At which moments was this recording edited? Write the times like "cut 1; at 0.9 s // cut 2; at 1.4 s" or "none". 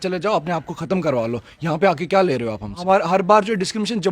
cut 1; at 2.7 s